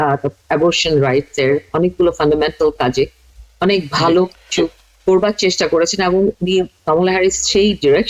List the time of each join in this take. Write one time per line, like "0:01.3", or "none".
none